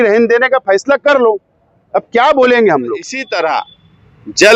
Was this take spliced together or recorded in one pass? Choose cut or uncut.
cut